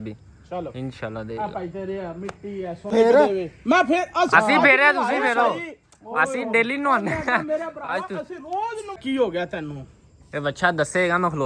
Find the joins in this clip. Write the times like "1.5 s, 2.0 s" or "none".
2.9 s, 9.0 s